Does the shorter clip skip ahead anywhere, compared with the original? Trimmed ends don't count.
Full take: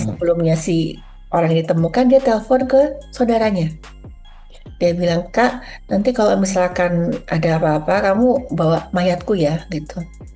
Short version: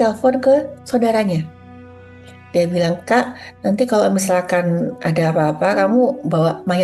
no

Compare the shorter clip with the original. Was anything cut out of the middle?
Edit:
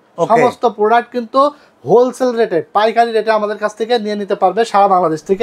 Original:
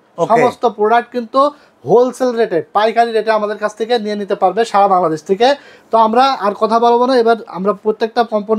no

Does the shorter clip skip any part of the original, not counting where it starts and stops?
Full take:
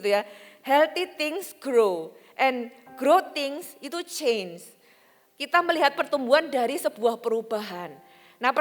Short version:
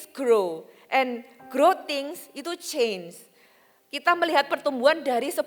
no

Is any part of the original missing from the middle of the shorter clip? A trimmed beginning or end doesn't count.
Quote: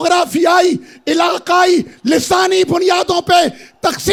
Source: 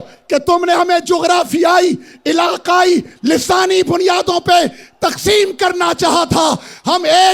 no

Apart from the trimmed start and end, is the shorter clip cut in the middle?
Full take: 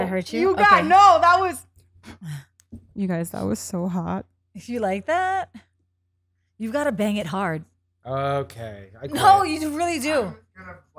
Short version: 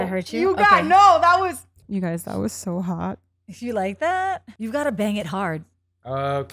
yes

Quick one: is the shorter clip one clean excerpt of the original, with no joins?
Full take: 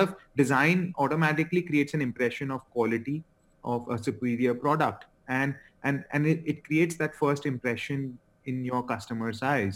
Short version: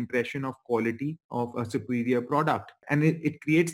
no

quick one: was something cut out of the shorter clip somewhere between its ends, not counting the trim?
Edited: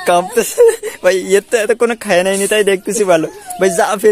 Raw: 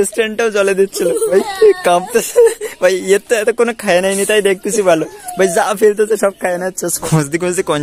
no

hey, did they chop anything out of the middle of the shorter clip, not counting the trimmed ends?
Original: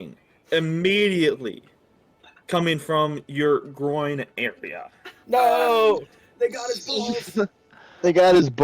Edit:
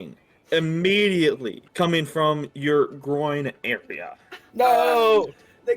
yes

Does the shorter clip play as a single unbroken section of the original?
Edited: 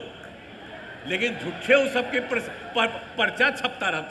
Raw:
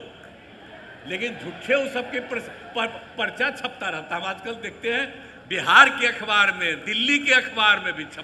yes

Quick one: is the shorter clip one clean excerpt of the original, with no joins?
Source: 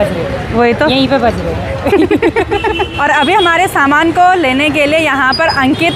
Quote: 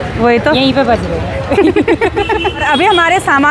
no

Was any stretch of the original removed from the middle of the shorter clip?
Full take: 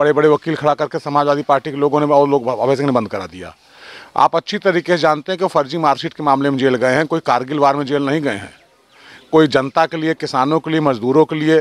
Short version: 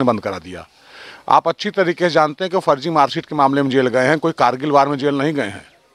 no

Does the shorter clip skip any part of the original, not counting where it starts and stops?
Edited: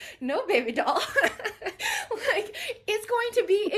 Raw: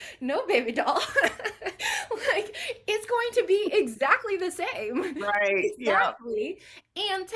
no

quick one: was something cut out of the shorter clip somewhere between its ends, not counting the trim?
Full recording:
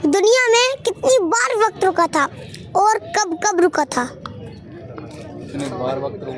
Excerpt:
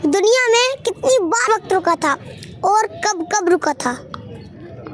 yes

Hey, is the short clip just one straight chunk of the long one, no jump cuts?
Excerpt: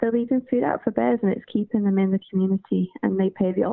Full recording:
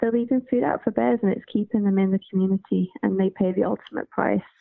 yes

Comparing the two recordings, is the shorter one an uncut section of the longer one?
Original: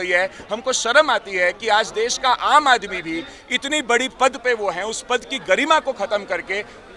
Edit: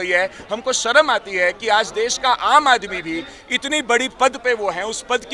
yes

